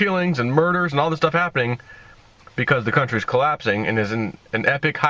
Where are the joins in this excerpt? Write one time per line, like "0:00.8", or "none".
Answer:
0:03.1